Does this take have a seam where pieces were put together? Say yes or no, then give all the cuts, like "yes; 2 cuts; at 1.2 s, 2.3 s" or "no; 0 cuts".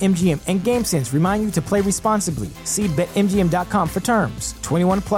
no; 0 cuts